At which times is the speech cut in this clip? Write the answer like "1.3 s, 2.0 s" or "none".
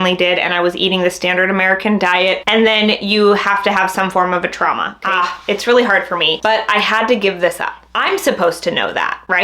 2.4 s, 5.0 s, 7.8 s

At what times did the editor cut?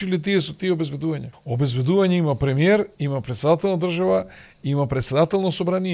1.4 s

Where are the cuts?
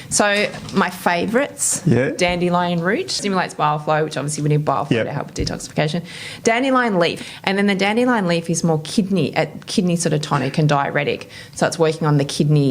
3.2 s, 7.2 s

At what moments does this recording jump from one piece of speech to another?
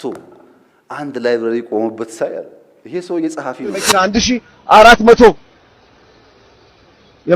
3.9 s

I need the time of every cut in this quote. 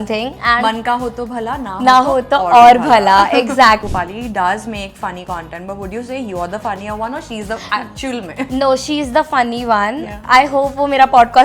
3.9 s

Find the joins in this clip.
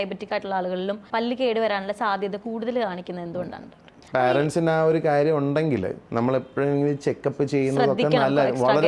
1.0 s, 3.9 s, 6.0 s

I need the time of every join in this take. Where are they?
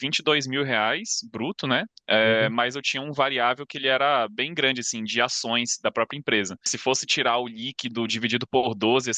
6.7 s

